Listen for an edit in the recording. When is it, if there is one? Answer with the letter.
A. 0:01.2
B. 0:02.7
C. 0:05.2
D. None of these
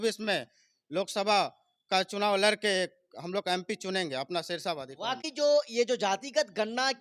C